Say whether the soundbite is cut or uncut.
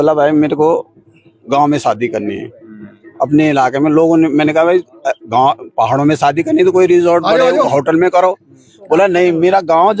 uncut